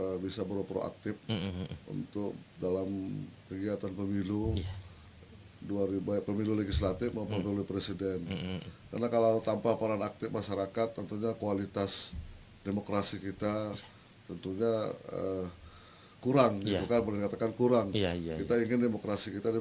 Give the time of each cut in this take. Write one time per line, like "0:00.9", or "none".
none